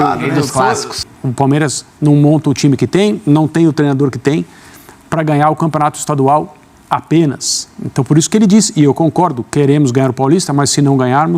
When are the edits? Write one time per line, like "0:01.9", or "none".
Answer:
0:01.0

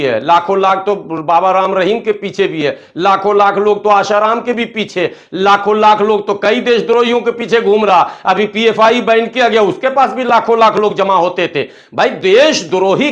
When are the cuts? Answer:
none

